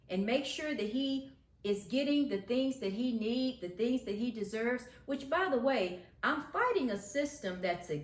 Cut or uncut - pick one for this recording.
uncut